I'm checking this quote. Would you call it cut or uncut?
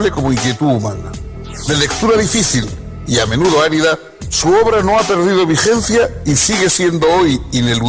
cut